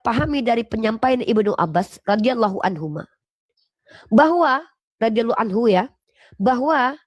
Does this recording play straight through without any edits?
yes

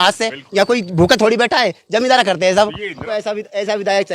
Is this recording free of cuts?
no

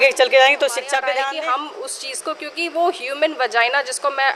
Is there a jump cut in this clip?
yes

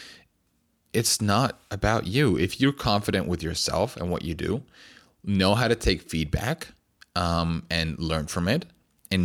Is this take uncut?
yes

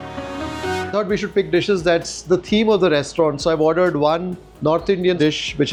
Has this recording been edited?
no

